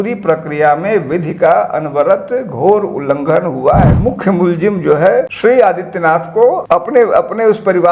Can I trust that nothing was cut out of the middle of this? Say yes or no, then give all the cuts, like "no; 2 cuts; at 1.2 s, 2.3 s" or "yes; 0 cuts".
no; 3 cuts; at 4.0 s, 5.3 s, 6.6 s